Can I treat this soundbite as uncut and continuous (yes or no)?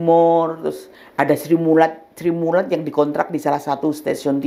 yes